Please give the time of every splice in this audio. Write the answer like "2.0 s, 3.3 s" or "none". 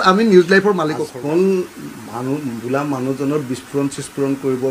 1.0 s